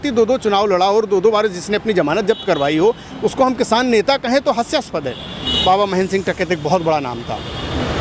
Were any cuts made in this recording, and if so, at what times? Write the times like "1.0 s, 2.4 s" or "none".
5.6 s